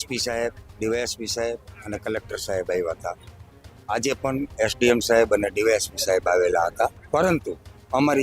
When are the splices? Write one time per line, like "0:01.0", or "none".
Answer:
0:07.0